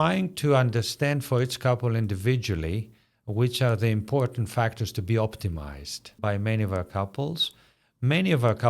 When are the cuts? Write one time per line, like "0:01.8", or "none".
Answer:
0:06.2